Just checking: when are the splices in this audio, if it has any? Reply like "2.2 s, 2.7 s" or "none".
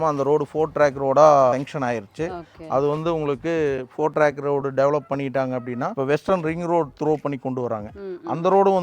1.5 s, 5.9 s

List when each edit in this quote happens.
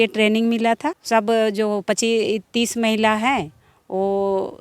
0.9 s

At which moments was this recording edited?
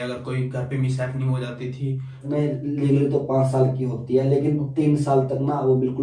2.3 s

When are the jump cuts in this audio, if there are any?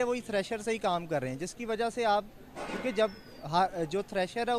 none

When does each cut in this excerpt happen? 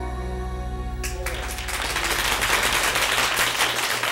2.4 s

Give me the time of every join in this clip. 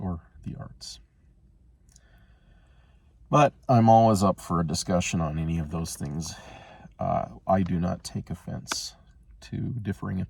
none

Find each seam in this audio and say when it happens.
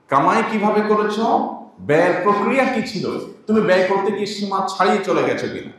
none

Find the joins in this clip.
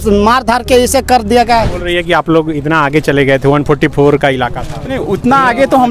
1.8 s

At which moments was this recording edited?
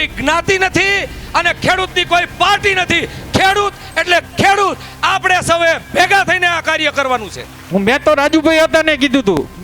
7.6 s

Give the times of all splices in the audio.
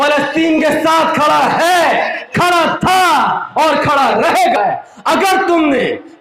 4.6 s

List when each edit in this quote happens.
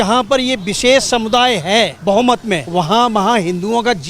2.0 s, 2.6 s

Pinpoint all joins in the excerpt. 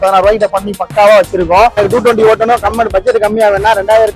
1.7 s

